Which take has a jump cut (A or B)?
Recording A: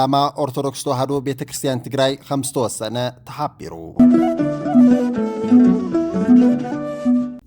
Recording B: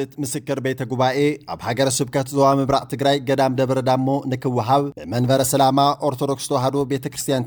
A